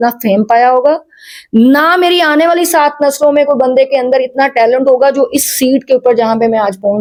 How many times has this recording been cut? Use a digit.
0